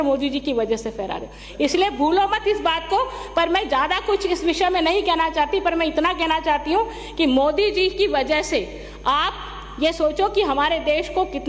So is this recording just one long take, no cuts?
yes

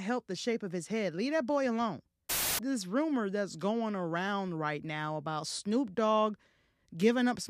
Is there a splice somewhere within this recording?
yes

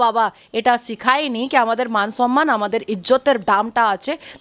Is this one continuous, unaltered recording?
yes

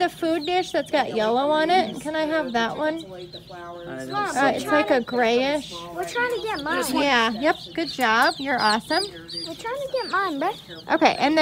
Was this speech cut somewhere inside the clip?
no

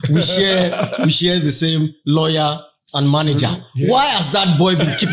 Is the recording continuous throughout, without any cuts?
yes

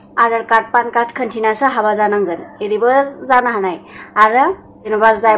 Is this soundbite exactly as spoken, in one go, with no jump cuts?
no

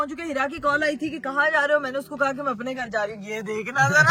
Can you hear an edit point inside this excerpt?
no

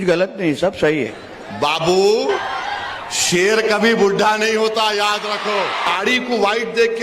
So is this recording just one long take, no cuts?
no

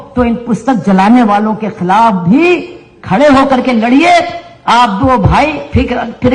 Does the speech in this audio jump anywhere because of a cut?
no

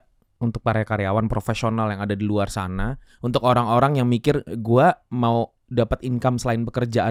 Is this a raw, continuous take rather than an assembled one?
yes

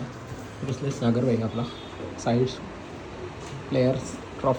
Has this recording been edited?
no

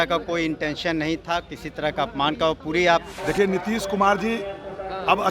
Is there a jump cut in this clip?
yes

